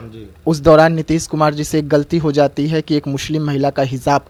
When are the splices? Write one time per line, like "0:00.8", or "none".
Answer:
none

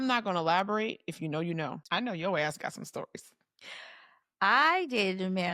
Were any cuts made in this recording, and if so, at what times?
0:01.8

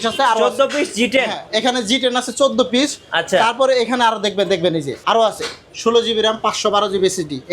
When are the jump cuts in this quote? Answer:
0:04.9

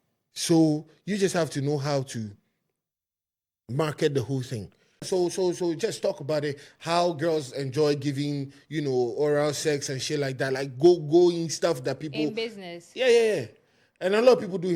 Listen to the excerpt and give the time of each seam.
0:05.1

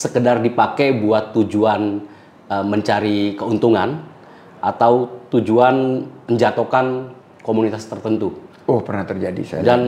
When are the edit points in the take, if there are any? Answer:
none

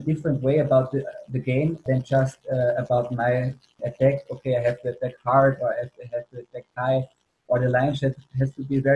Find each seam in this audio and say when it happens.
0:01.8
0:03.7

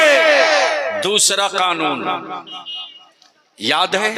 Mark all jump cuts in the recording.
none

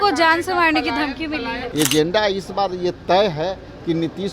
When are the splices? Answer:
0:01.6

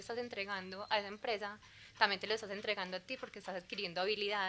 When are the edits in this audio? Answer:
none

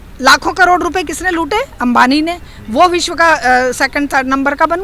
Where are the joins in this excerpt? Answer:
none

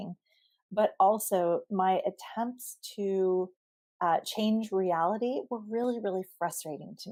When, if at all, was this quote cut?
none

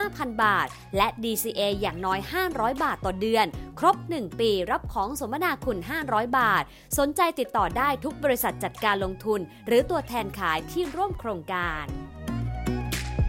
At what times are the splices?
0:11.7

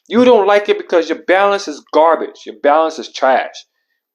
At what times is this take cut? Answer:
none

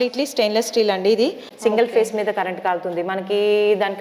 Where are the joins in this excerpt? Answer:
0:01.5

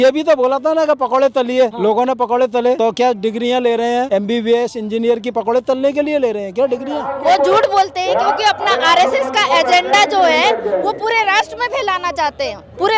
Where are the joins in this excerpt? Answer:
0:01.7
0:02.8
0:04.1
0:07.1

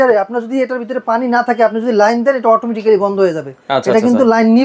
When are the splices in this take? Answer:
none

